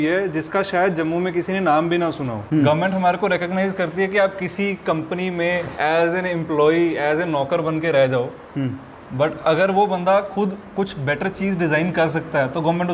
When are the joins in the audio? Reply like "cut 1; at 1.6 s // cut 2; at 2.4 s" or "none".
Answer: cut 1; at 2.3 s // cut 2; at 5.7 s